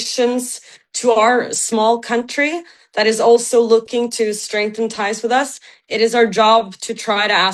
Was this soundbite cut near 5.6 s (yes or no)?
no